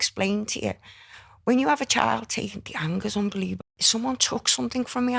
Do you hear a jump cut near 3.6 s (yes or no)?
yes